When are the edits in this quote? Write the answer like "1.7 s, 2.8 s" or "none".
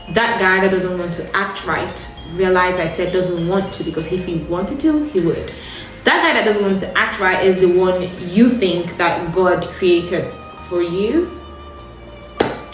none